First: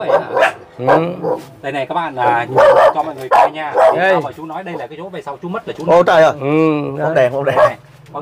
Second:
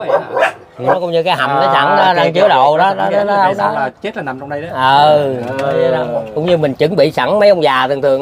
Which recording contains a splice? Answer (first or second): second